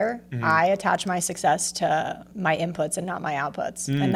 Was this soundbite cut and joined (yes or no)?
no